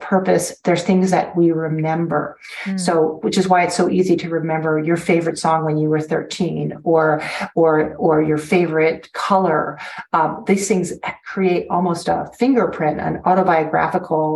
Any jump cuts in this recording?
no; 0 cuts

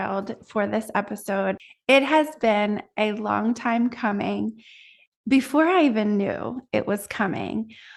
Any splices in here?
no; 0 cuts

